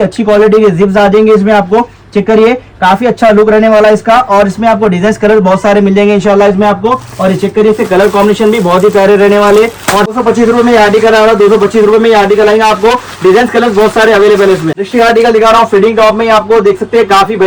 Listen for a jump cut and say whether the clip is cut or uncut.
uncut